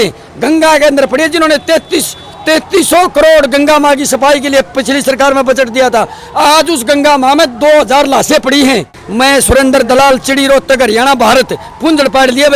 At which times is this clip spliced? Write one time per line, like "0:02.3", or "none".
0:08.9